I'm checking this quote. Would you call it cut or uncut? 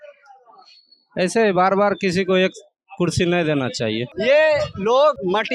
uncut